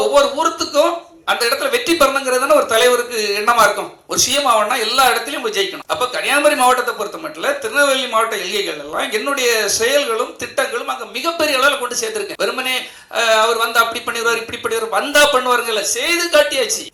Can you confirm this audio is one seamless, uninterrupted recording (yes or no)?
yes